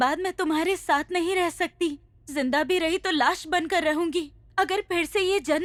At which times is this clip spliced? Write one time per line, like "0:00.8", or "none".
none